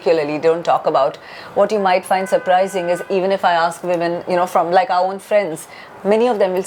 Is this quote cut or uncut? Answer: uncut